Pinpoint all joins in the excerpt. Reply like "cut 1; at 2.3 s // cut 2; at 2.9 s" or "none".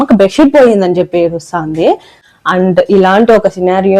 cut 1; at 2.1 s